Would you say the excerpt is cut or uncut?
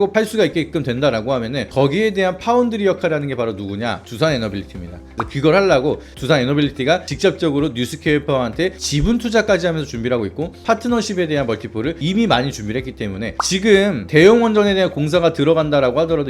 cut